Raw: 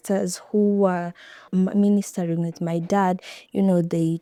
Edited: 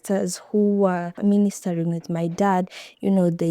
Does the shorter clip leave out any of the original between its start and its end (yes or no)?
yes